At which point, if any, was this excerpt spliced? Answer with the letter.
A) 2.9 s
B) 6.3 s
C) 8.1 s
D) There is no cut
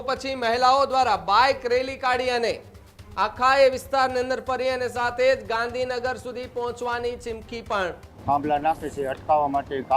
C